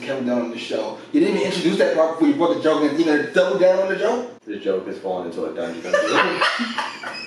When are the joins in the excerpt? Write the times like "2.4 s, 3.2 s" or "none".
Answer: 4.4 s